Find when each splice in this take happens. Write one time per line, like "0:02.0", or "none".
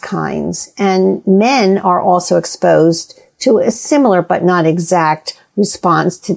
none